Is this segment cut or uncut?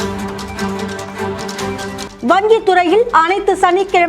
cut